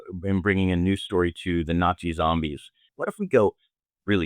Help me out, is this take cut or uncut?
cut